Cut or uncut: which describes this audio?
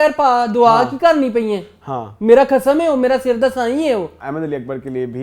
cut